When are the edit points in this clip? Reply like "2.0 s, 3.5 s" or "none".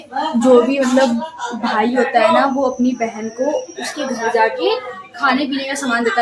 none